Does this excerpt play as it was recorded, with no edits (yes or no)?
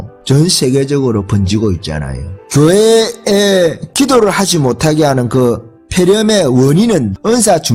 yes